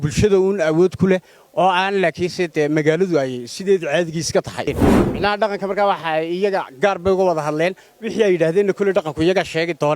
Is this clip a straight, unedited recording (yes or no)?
no